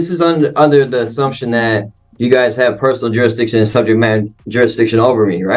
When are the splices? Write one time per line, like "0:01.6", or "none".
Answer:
none